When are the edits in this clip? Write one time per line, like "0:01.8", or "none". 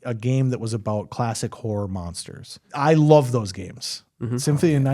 0:02.6